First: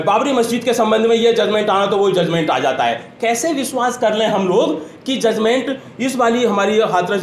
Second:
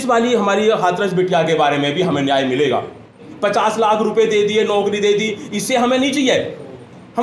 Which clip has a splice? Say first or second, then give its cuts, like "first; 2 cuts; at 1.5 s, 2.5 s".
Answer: second; 1 cut; at 3.3 s